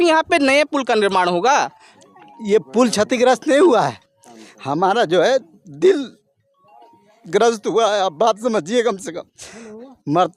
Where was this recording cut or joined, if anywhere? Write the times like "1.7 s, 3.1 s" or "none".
1.8 s